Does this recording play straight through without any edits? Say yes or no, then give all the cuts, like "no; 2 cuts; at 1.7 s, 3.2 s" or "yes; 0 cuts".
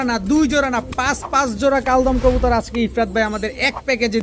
yes; 0 cuts